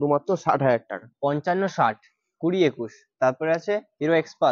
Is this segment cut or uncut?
uncut